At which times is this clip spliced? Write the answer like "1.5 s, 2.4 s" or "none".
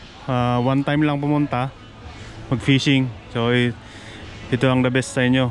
none